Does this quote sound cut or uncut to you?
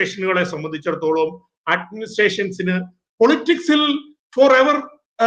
uncut